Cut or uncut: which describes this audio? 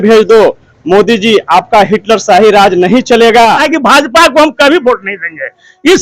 cut